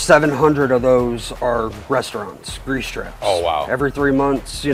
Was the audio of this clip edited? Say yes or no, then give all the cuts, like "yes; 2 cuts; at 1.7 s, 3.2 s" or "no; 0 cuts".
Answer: no; 0 cuts